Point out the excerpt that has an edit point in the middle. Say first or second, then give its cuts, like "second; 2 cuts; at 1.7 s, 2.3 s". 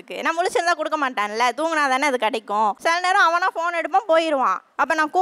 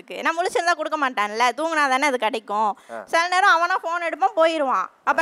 first; 1 cut; at 2.8 s